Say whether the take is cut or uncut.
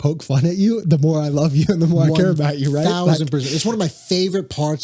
uncut